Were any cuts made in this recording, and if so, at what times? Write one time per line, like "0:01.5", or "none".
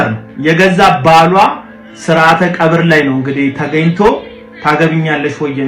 none

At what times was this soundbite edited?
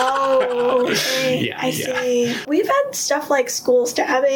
0:02.5

